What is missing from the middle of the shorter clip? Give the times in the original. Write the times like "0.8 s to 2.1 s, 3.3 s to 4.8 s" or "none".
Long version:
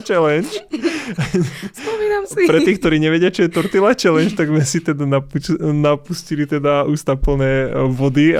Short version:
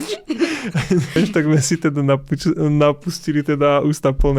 1.6 s to 4.2 s